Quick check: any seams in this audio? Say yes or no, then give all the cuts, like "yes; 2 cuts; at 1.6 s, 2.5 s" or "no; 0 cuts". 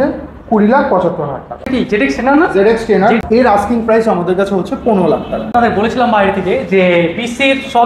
yes; 3 cuts; at 1.5 s, 3.2 s, 5.4 s